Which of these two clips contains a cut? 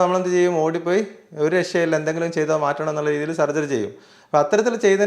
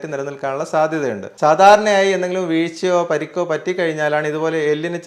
second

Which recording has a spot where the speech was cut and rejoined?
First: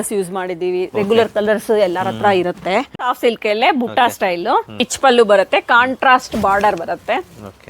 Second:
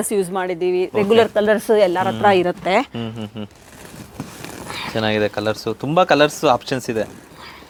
first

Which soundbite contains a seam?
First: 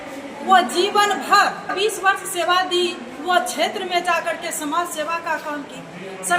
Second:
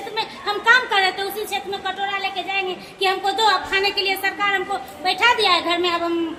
first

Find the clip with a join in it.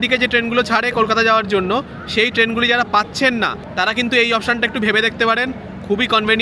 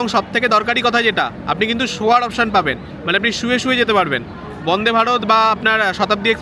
first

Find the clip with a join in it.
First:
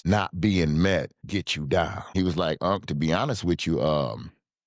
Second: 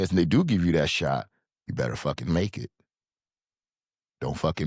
first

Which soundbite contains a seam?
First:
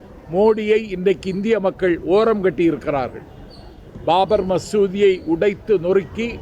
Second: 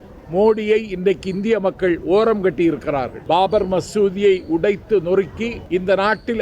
second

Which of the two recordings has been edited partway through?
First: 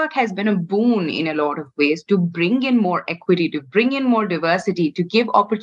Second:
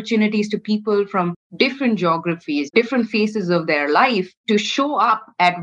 second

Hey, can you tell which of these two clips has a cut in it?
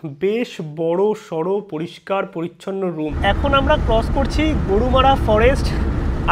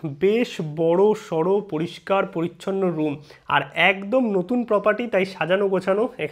first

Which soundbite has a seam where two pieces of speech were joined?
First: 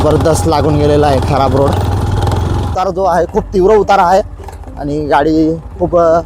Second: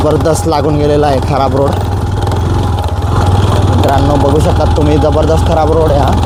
first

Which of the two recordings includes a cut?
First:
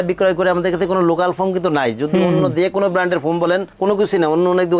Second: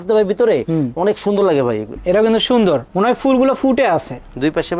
second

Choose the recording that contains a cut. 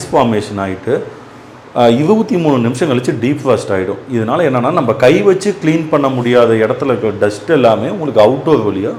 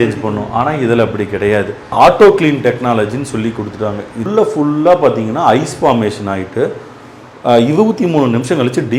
second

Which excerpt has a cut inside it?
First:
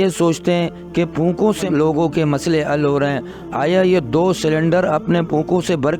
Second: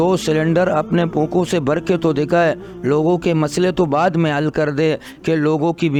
first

